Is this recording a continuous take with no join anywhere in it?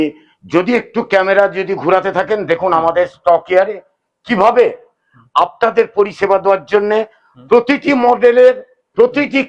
yes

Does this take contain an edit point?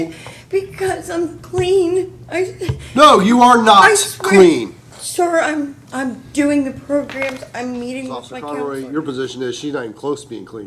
yes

